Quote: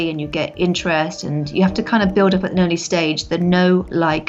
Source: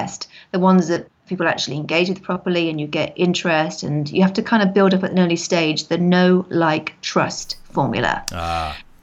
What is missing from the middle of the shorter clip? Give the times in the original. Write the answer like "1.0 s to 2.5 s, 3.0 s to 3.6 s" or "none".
none